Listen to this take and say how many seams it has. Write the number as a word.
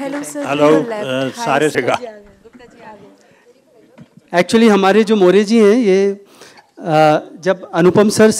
one